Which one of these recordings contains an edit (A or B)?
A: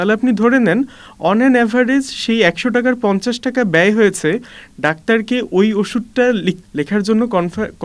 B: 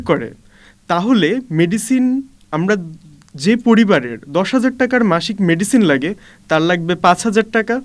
A